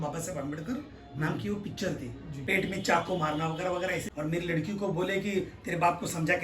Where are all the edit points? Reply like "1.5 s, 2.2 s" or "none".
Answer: 2.4 s, 4.1 s